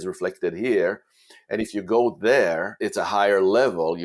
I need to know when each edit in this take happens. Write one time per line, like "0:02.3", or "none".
0:02.8